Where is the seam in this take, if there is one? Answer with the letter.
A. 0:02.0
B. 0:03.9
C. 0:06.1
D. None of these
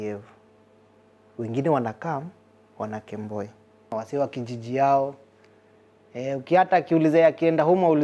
B